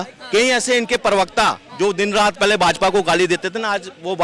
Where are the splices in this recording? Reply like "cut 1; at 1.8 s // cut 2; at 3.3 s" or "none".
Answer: none